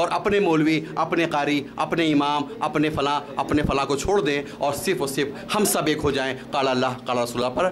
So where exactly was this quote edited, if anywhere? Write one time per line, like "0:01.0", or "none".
none